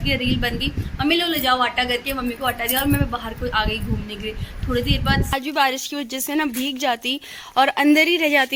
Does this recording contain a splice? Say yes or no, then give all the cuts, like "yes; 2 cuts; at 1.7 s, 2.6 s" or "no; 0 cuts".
yes; 1 cut; at 5.3 s